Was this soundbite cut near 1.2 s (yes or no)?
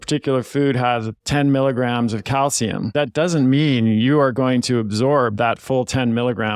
yes